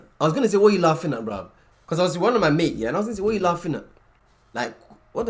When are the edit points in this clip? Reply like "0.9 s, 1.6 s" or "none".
none